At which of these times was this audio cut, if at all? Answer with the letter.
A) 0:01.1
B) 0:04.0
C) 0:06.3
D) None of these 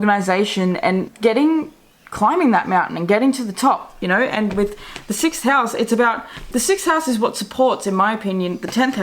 A